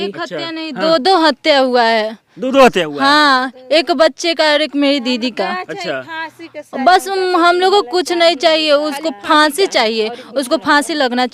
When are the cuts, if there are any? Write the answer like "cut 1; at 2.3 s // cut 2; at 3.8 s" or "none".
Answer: none